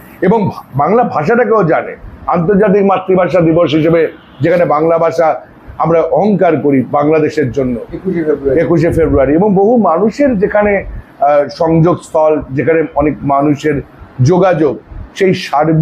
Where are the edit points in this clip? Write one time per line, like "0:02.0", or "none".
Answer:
none